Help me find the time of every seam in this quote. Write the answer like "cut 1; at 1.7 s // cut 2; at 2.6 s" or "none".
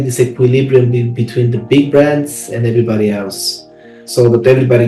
none